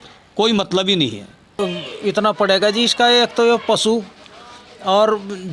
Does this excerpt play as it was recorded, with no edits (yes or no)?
no